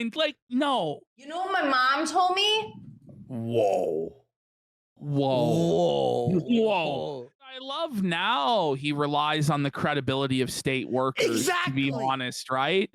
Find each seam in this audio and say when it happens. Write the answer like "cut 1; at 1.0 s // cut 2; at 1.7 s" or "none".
cut 1; at 1.4 s // cut 2; at 7.6 s